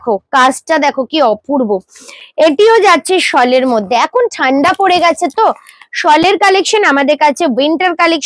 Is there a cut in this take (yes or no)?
no